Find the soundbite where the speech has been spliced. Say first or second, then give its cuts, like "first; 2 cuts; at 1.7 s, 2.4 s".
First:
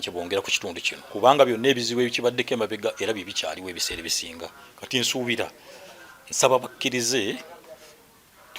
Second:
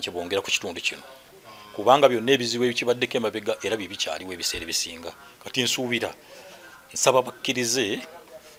first; 1 cut; at 0.9 s